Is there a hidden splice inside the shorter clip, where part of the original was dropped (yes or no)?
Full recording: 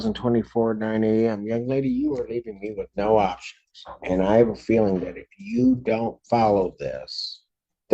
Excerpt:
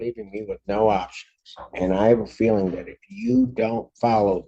no